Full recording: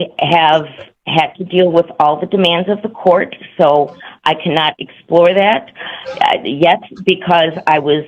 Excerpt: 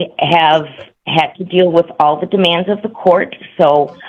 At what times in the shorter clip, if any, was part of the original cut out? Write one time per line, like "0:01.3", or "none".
none